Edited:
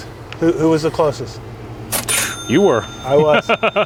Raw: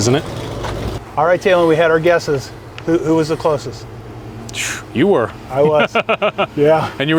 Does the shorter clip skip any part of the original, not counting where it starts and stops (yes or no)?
no